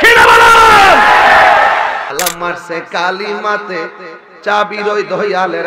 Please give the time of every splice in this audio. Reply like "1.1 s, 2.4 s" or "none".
2.1 s